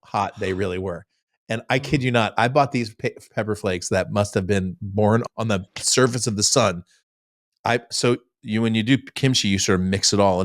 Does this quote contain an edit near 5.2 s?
yes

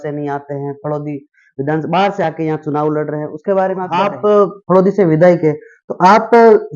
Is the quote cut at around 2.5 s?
no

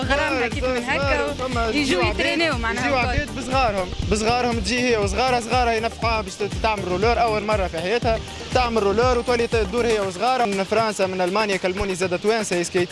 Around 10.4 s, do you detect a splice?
yes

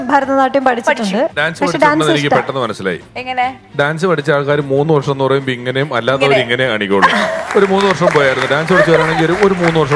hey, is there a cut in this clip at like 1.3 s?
yes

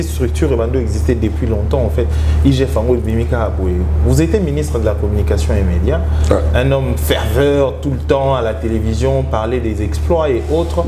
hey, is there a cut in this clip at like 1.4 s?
no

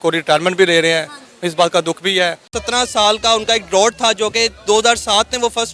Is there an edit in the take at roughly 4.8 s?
no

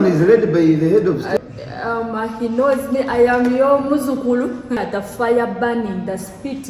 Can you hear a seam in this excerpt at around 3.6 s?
no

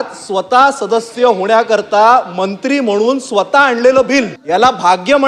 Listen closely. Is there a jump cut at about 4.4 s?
yes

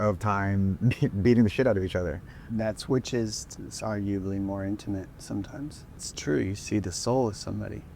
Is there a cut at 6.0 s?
yes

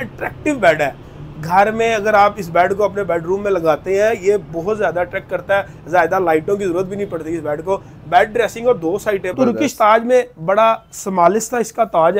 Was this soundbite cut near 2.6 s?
no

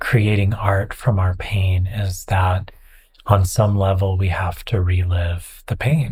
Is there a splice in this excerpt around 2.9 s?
no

